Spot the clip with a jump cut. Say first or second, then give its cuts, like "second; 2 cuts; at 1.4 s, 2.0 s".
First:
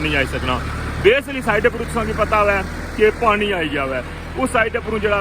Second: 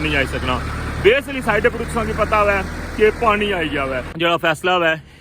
second; 1 cut; at 4.1 s